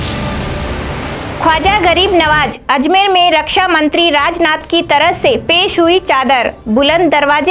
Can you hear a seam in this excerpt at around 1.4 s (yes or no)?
yes